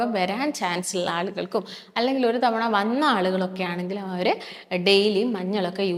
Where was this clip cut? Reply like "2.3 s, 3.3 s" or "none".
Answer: none

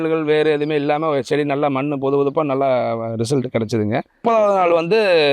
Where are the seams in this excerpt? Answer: 4.2 s

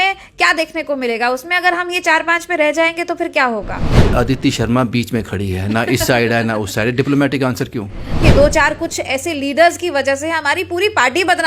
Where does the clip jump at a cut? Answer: 4.1 s, 8.2 s

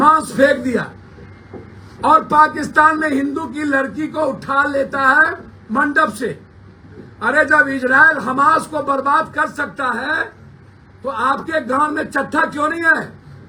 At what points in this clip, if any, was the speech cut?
none

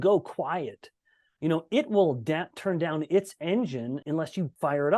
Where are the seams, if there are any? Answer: 4.0 s

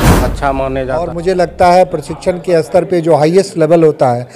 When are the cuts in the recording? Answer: 1.1 s

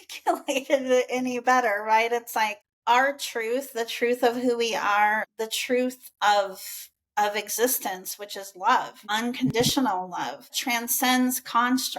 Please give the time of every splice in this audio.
2.7 s, 5.3 s, 9.0 s, 10.5 s

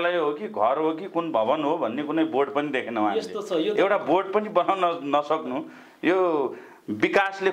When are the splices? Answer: none

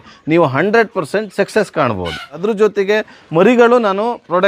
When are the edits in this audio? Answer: 2.3 s

